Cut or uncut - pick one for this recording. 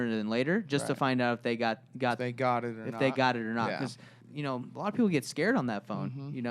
cut